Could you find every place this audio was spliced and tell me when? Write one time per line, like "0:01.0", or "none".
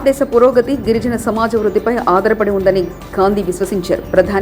none